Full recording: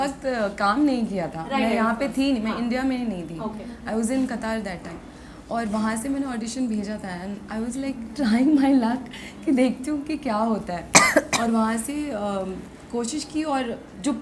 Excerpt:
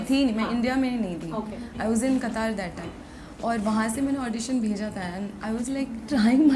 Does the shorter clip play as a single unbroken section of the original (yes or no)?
yes